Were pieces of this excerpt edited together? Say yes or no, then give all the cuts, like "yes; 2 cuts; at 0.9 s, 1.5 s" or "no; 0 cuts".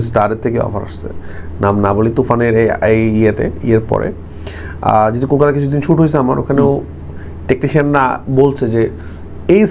no; 0 cuts